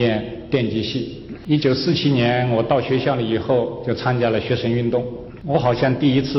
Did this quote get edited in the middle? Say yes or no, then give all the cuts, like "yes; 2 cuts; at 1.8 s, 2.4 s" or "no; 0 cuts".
yes; 2 cuts; at 1.3 s, 5.2 s